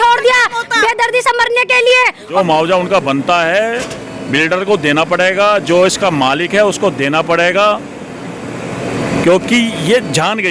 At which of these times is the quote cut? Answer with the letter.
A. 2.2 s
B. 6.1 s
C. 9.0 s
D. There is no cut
A